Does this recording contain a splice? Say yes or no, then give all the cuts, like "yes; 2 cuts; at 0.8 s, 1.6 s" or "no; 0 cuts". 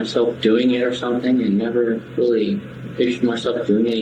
no; 0 cuts